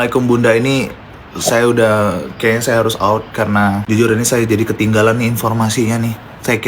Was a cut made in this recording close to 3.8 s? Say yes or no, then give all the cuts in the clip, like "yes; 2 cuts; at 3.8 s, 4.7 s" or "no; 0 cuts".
yes; 1 cut; at 3.8 s